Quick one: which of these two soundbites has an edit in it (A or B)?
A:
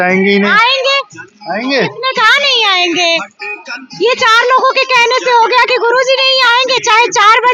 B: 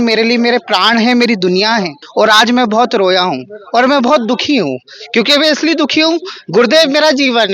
B